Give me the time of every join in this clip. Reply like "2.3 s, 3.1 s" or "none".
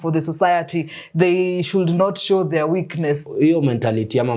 3.3 s